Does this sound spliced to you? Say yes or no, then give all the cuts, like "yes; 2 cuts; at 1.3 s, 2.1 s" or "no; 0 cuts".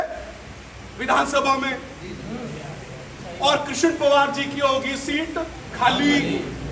no; 0 cuts